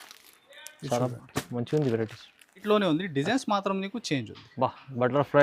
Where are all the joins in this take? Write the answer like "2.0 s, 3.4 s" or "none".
2.6 s